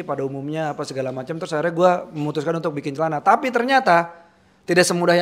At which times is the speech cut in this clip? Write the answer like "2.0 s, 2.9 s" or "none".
none